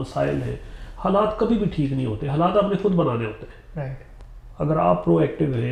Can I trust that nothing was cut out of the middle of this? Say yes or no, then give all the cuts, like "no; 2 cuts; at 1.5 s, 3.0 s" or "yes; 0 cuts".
yes; 0 cuts